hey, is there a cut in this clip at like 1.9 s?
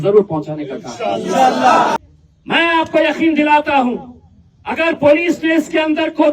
yes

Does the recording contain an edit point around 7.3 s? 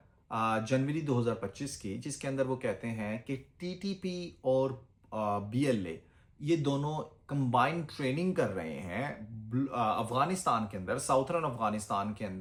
no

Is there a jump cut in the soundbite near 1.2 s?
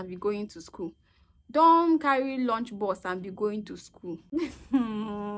no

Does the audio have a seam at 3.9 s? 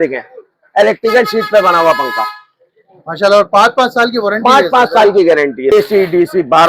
no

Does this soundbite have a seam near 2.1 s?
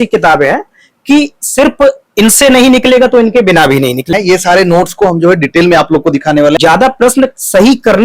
no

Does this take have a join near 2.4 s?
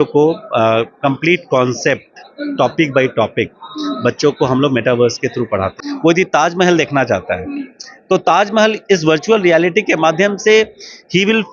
no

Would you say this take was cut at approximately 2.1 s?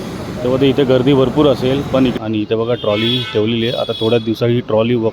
yes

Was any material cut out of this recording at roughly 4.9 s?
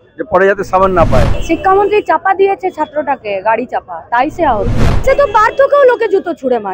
yes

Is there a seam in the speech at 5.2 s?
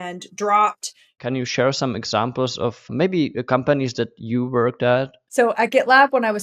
yes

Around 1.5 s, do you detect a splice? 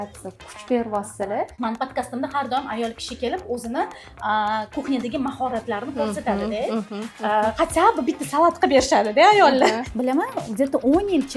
yes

